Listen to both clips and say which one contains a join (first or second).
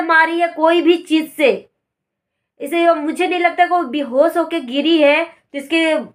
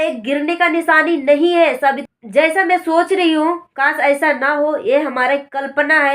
second